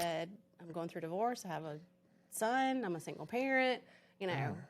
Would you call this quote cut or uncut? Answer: uncut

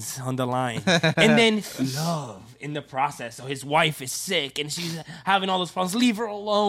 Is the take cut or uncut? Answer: uncut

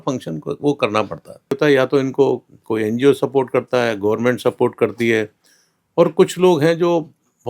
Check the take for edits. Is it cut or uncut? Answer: cut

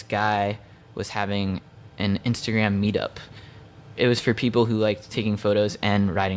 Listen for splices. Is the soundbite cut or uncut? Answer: uncut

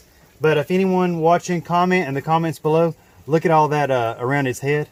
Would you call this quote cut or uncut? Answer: uncut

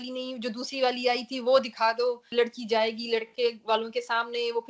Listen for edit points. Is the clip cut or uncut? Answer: cut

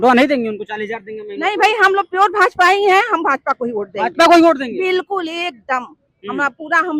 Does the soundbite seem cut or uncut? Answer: uncut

